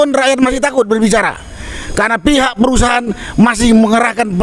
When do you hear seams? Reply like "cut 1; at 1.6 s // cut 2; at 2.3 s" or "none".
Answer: none